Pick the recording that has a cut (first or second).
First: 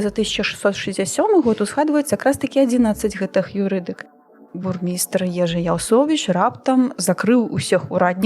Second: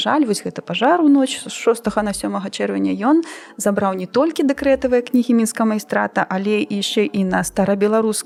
first